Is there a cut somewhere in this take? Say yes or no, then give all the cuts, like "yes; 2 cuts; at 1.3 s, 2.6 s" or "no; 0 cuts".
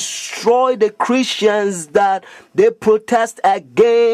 no; 0 cuts